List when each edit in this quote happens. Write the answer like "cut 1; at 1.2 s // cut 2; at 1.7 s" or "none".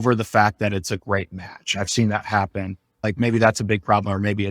cut 1; at 3.0 s